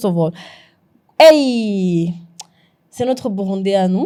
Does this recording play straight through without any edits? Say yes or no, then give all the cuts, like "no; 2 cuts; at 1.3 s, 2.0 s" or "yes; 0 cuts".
yes; 0 cuts